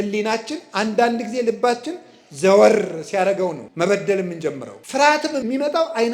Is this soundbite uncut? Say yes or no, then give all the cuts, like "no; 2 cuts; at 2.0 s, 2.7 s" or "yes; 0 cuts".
no; 3 cuts; at 3.6 s, 4.7 s, 5.4 s